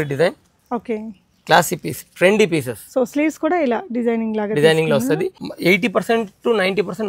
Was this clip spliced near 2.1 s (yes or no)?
no